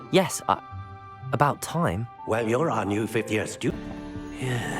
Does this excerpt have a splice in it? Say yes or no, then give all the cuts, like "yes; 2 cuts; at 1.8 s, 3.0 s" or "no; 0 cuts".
yes; 1 cut; at 3.7 s